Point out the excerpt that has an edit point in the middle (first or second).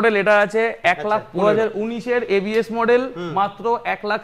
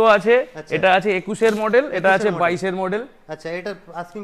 first